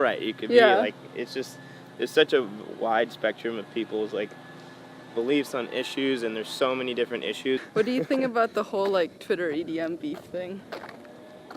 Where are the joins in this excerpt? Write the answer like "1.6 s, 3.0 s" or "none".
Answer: 7.7 s